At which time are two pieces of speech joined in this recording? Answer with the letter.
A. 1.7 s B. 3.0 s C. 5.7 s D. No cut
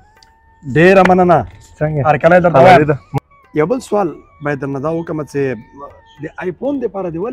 B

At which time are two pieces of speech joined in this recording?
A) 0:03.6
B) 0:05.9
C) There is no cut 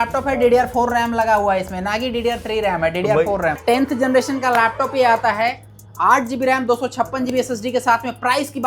A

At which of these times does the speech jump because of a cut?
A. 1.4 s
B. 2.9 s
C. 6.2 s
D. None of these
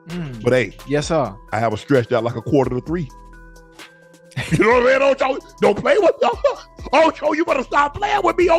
A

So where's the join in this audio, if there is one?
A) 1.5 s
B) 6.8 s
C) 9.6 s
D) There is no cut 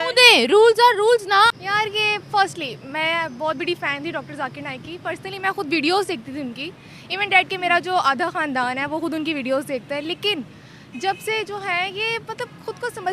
A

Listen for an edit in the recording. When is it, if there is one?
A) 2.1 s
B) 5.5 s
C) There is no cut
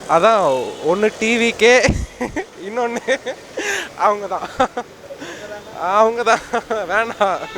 C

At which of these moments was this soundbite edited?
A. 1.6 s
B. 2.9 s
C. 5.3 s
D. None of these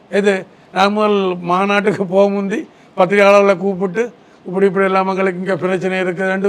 D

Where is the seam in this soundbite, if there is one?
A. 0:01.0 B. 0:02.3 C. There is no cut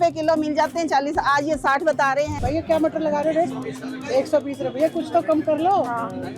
B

